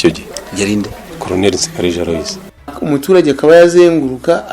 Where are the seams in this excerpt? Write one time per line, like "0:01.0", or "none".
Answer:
0:00.8
0:02.8